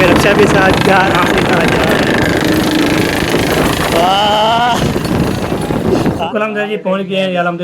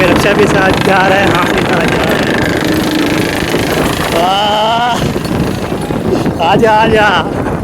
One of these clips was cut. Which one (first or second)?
first